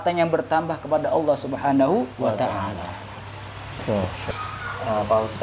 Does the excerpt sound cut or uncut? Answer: cut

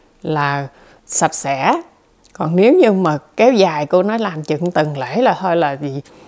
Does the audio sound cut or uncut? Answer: uncut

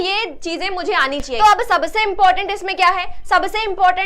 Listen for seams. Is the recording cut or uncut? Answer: cut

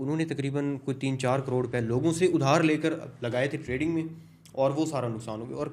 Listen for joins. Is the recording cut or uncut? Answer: uncut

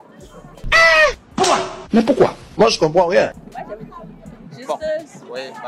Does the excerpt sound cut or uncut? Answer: cut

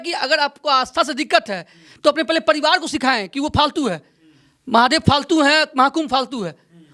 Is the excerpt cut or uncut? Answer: uncut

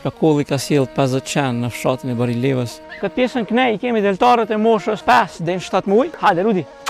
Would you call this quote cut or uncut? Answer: cut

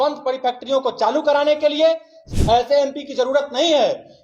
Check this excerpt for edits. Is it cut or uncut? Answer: cut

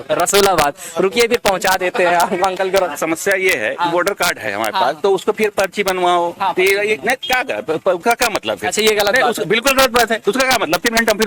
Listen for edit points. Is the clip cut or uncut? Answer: cut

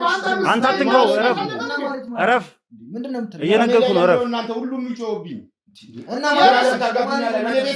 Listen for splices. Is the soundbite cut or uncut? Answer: uncut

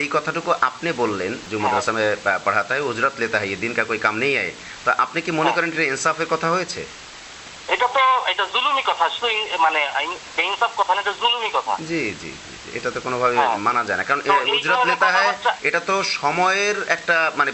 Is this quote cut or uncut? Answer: uncut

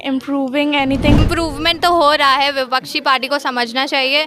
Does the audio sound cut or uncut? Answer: cut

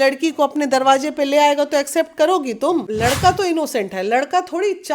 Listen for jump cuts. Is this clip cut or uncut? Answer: cut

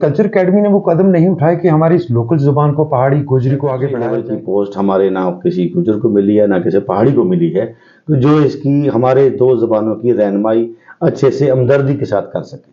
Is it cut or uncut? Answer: cut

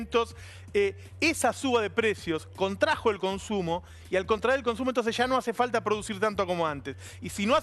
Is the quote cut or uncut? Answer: cut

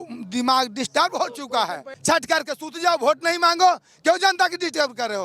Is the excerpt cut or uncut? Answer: cut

